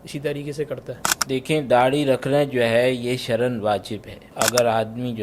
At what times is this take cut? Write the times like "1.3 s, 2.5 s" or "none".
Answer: 1.1 s, 4.2 s